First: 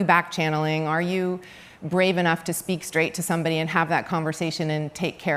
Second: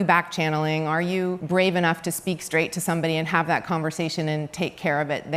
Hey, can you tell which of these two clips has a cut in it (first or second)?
second